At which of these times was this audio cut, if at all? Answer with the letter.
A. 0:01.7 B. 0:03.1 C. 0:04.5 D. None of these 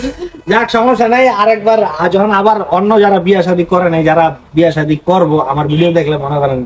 D